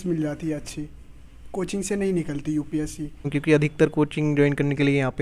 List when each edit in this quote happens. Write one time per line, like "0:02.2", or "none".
0:03.3

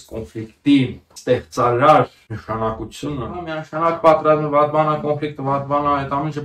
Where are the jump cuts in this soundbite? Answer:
0:01.1
0:02.3
0:03.6

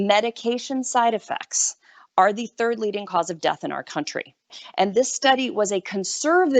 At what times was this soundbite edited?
0:04.5

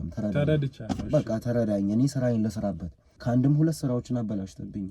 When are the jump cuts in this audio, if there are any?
0:03.1

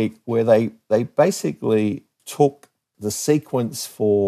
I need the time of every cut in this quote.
0:02.2
0:02.8

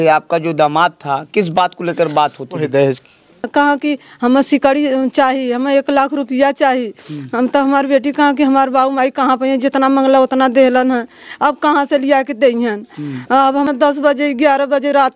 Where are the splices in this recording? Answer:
0:03.5
0:13.6

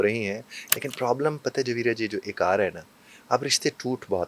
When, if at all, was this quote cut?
none

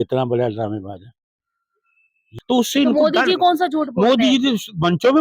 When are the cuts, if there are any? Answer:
0:02.2

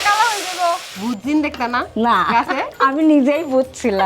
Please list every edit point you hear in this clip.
0:00.9
0:02.7

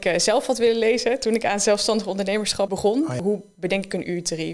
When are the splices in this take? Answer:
0:03.0

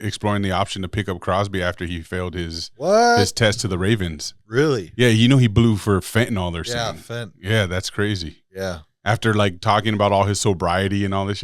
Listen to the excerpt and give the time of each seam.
none

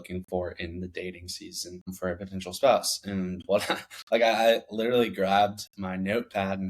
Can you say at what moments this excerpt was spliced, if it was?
0:01.9

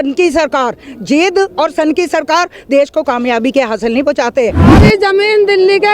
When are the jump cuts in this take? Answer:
0:04.8

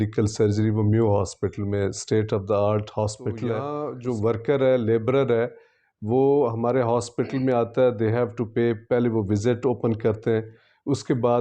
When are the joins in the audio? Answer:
0:03.8

